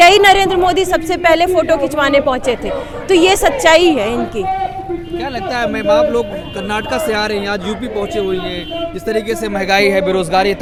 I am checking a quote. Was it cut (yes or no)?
no